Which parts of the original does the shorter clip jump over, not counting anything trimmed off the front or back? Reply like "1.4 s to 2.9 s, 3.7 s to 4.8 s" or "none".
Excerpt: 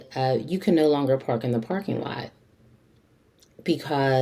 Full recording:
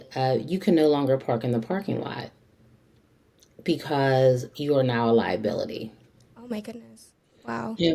none